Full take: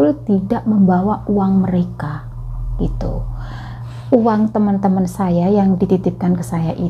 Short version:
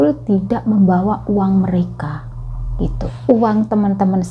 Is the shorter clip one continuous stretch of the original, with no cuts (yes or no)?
no